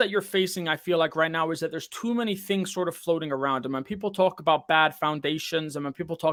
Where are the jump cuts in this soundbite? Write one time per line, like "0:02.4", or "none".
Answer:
none